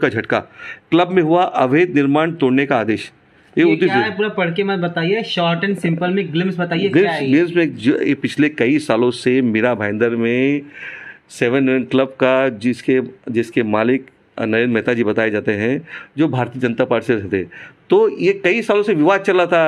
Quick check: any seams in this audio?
no; 0 cuts

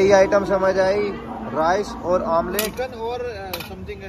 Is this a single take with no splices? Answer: yes; 0 cuts

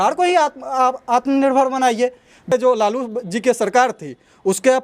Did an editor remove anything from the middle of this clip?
yes; 1 cut; at 2.5 s

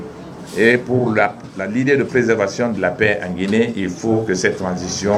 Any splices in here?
no; 0 cuts

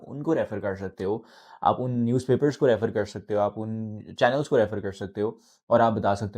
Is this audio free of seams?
yes; 0 cuts

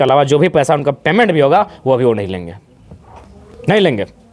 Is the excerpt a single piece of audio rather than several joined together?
yes; 0 cuts

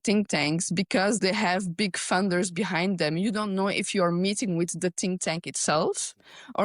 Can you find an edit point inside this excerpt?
yes; 1 cut; at 1.2 s

